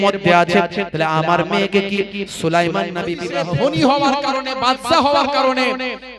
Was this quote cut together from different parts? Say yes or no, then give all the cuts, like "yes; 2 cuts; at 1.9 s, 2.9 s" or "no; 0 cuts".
yes; 1 cut; at 3.2 s